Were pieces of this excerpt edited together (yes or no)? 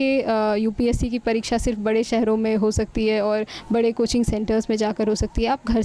no